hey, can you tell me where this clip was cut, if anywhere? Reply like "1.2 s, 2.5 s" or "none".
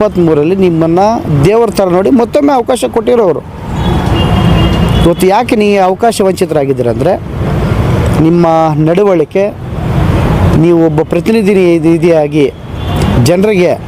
none